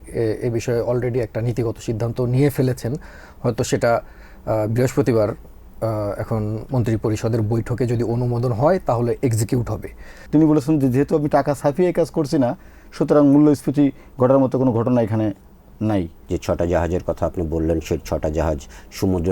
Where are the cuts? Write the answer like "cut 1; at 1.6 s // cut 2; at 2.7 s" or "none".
cut 1; at 10.1 s // cut 2; at 16.2 s